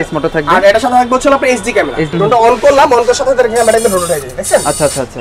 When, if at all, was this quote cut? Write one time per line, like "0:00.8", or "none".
0:02.0